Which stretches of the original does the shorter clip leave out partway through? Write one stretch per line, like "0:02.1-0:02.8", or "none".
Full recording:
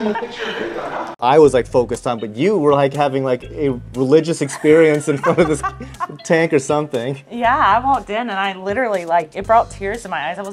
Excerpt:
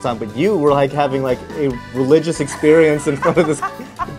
none

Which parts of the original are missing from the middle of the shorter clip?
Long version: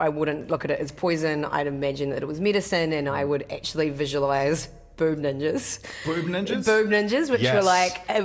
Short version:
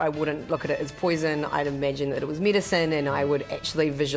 none

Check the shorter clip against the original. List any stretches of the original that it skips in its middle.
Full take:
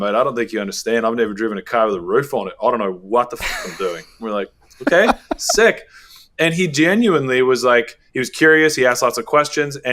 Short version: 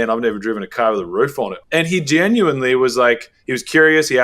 0:02.5-0:06.2

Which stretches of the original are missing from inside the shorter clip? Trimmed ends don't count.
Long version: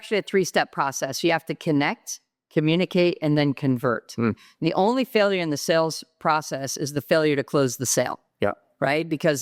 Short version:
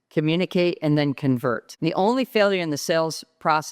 0:04.1-0:04.5

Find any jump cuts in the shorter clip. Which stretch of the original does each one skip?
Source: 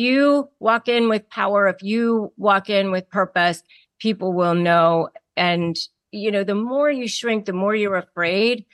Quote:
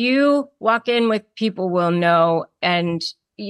0:01.3-0:03.9
0:05.2-0:05.3

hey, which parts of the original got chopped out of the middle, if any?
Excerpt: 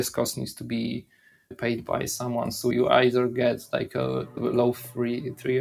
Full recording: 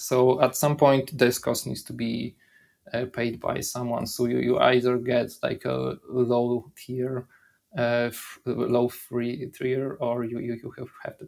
0:02.8-0:03.1
0:04.3-0:04.4
0:06.1-0:08.6

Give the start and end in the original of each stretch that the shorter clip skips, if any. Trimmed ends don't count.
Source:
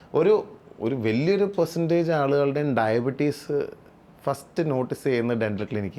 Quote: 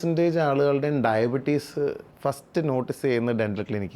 0:03.8-0:04.1

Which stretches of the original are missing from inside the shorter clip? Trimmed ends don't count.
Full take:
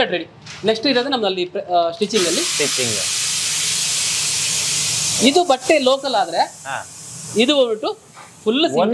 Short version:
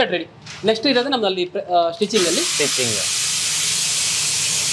none

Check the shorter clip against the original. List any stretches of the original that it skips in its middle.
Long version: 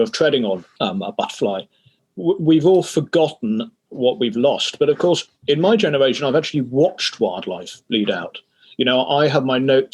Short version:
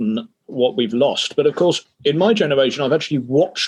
none

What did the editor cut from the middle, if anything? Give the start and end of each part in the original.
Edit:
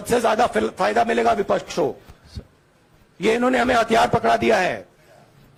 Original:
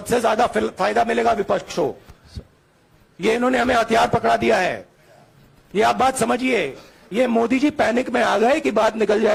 none

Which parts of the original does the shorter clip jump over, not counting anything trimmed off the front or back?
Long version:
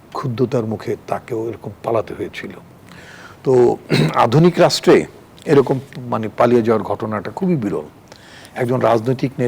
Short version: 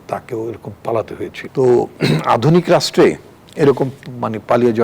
0:02.4-0:03.3

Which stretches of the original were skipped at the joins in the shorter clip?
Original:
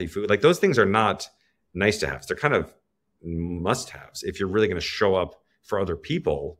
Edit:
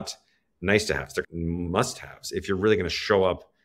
0:02.4-0:03.2

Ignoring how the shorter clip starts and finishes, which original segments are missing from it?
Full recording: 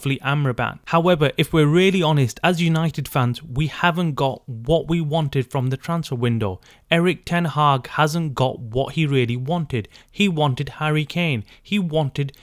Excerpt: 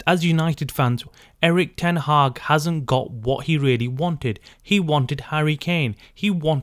0:03.5-0:06.6

